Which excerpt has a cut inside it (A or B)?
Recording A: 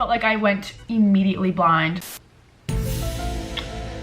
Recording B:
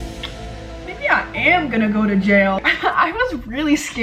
A